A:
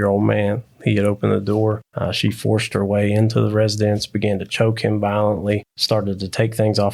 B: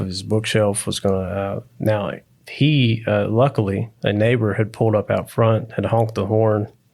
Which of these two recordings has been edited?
A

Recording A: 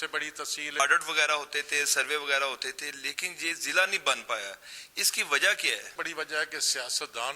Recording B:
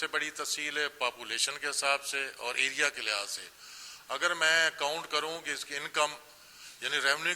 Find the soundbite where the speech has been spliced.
A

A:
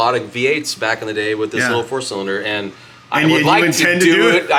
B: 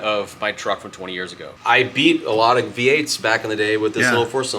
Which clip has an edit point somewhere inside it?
B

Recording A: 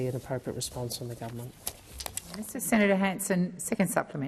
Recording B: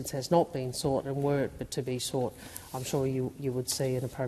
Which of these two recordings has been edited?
A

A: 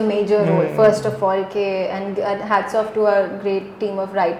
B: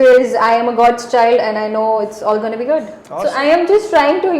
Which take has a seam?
B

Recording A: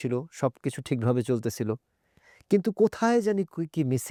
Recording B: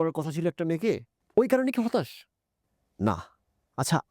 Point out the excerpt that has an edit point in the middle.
B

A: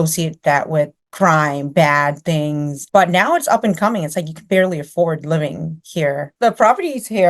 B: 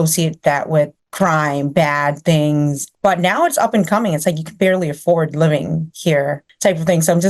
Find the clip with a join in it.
A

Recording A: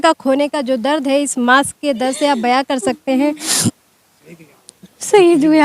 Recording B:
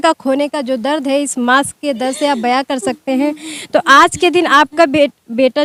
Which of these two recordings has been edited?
A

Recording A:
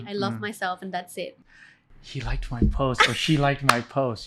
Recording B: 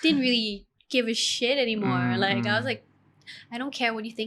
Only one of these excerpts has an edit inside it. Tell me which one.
A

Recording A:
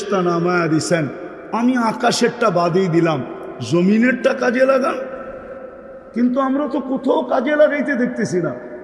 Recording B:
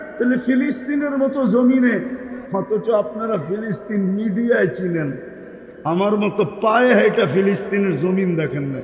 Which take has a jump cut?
B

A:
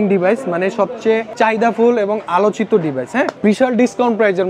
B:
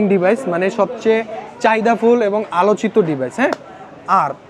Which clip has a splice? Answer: A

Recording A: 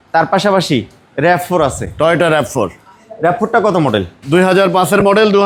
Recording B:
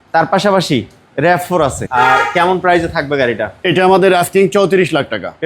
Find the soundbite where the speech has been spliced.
B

